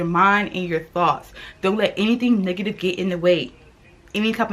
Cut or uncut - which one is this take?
uncut